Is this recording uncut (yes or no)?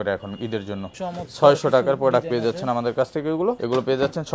no